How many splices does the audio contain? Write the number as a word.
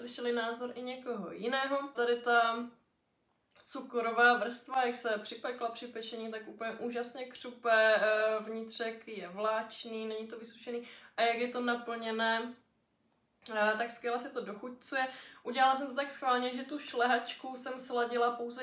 one